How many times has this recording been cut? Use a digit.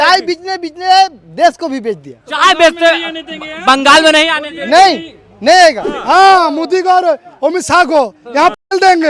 1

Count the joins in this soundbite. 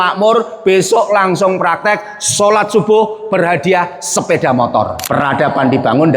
1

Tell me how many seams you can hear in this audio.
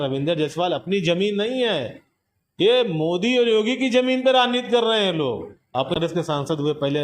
1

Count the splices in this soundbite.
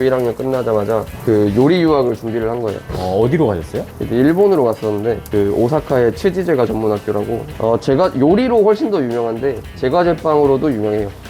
4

